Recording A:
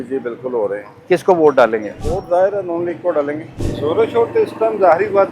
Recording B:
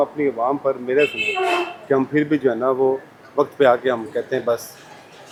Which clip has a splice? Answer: A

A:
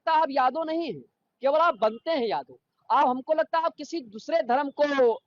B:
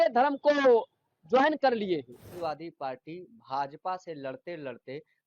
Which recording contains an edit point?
B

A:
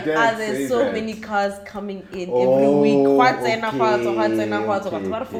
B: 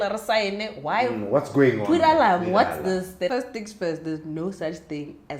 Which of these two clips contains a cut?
B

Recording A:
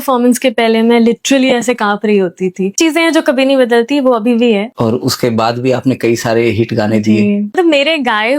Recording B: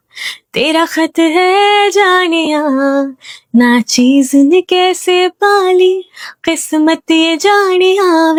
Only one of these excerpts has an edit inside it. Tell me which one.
A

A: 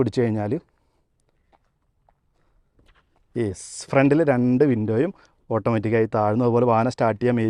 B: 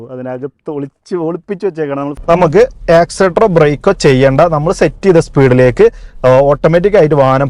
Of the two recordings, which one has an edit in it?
B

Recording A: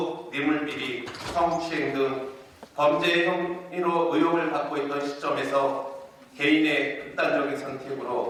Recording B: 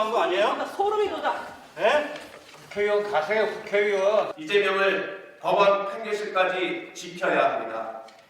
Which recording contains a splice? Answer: B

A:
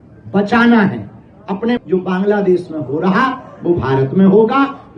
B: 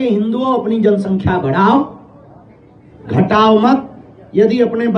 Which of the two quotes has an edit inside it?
A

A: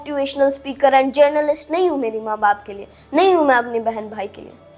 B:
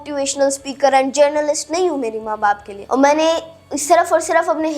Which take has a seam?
B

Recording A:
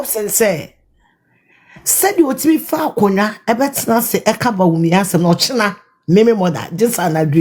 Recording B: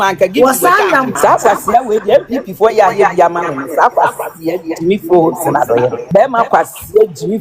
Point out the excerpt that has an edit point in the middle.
B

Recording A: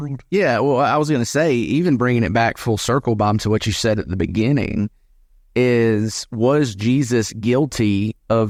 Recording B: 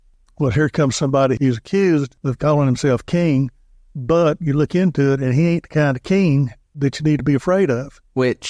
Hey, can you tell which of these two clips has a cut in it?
B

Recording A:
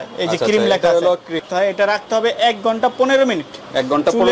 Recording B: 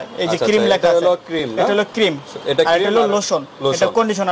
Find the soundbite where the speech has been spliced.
A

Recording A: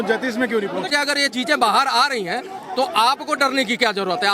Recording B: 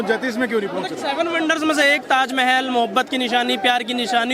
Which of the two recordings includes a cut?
A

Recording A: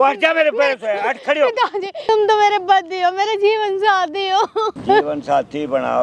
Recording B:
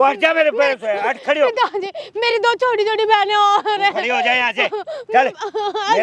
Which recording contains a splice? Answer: A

